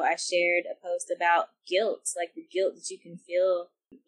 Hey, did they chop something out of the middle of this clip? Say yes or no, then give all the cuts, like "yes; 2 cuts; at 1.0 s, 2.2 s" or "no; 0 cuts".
no; 0 cuts